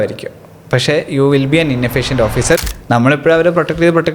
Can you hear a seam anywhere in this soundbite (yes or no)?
yes